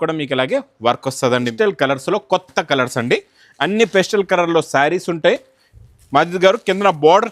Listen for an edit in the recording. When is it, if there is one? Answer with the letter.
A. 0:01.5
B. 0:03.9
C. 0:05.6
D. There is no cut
A